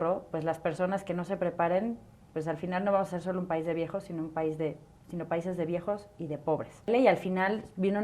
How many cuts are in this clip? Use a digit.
1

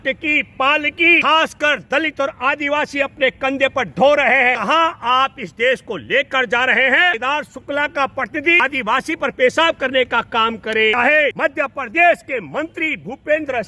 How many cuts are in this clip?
5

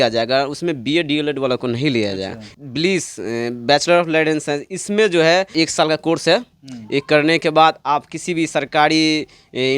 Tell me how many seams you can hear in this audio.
2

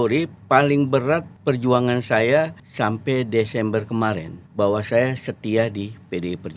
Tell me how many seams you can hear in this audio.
3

